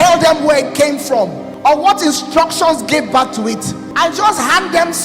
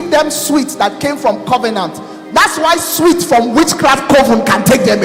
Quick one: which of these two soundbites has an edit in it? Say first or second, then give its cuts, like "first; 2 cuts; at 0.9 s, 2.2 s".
first; 2 cuts; at 1.4 s, 3.8 s